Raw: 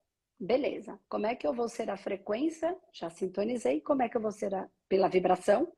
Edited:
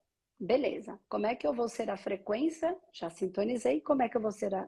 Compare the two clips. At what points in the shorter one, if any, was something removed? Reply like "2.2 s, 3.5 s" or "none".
none